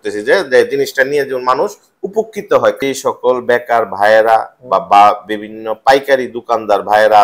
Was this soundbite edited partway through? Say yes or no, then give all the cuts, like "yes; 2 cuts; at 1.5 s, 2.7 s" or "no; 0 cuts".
yes; 1 cut; at 2.8 s